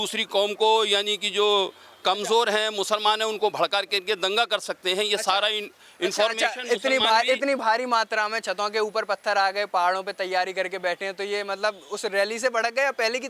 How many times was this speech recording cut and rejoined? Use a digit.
0